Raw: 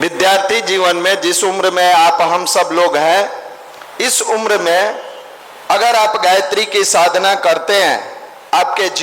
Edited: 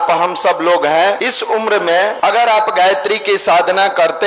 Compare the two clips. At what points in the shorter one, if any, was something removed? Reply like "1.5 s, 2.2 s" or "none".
1.2 s, 2.1 s